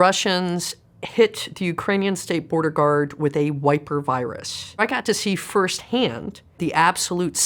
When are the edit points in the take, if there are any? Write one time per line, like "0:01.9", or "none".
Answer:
0:04.8
0:06.6